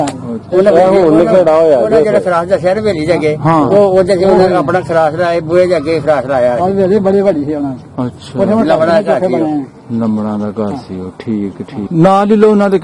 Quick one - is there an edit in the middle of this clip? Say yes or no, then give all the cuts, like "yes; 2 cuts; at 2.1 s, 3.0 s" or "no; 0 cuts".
yes; 1 cut; at 11.8 s